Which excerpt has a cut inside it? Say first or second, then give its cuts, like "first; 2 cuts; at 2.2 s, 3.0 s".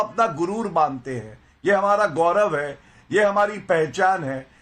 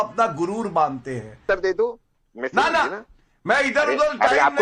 second; 1 cut; at 1.4 s